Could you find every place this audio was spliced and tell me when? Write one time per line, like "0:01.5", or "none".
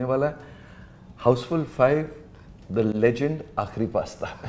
none